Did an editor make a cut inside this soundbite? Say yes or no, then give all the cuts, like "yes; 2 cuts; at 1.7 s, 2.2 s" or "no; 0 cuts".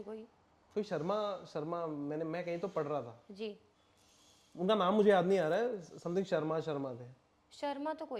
no; 0 cuts